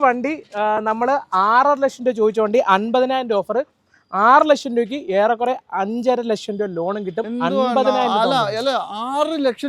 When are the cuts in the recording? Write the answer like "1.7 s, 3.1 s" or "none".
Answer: none